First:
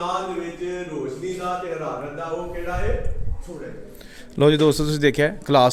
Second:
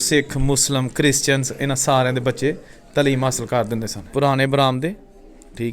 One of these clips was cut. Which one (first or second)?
second